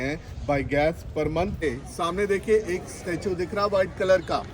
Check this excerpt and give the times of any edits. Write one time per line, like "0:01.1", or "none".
0:01.6